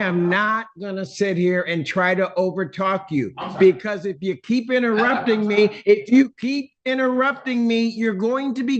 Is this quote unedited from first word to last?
yes; 0 cuts

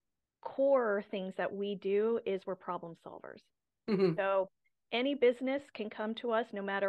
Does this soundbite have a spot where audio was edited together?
no; 0 cuts

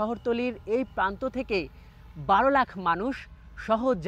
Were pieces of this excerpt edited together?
no; 0 cuts

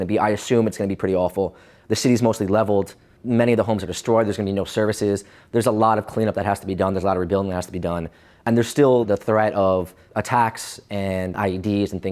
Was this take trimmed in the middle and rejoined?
yes; 5 cuts; at 3.1 s, 8.4 s, 9.1 s, 10.0 s, 11.3 s

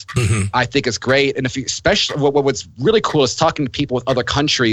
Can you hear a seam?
no; 0 cuts

